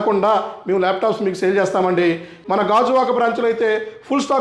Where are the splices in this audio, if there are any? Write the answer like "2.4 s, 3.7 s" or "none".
2.4 s